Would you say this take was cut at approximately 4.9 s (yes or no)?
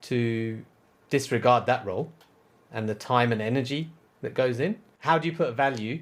yes